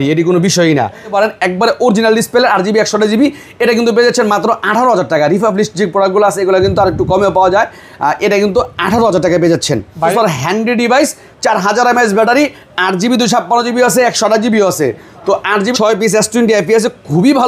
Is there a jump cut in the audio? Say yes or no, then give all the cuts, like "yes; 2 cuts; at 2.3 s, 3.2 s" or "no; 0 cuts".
yes; 3 cuts; at 1.1 s, 10.1 s, 15.7 s